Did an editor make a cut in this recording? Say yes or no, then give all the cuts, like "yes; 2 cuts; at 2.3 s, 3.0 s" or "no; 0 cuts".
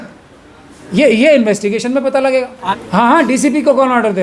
yes; 1 cut; at 2.6 s